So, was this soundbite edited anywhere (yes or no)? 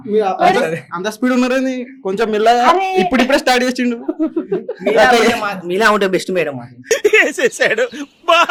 no